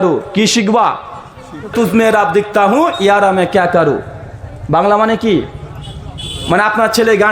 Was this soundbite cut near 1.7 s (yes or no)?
yes